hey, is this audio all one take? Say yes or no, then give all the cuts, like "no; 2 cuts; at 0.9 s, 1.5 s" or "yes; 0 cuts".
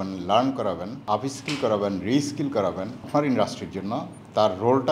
no; 2 cuts; at 1.0 s, 3.0 s